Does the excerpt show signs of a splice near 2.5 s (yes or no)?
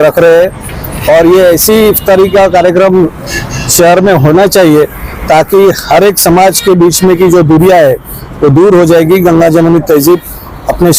no